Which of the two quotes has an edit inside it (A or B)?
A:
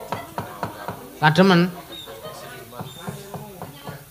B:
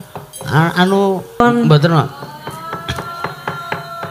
B